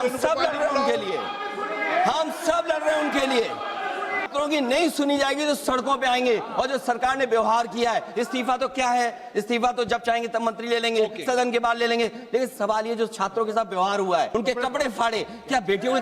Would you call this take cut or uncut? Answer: cut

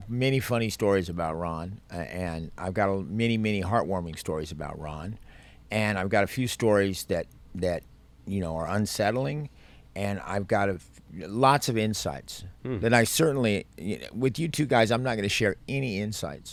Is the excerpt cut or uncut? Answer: uncut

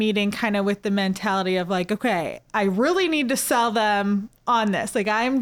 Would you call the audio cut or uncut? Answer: uncut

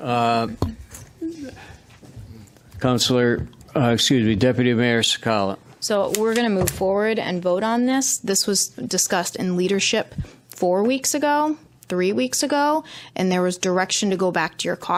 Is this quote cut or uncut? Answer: uncut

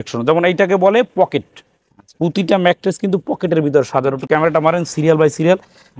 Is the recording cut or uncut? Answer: uncut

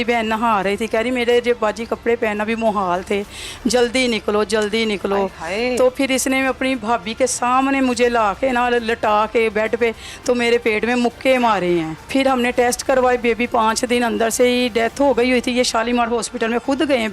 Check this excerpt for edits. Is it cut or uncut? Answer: cut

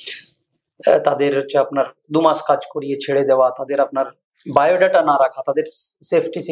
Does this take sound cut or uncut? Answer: uncut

